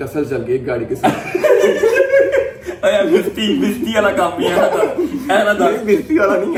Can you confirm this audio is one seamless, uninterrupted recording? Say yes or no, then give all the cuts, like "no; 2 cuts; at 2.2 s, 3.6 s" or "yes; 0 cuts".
yes; 0 cuts